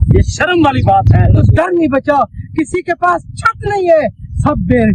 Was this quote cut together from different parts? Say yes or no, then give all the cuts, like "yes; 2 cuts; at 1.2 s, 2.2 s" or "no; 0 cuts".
yes; 1 cut; at 1.5 s